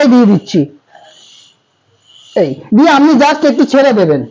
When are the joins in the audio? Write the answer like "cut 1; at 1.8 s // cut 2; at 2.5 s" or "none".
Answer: none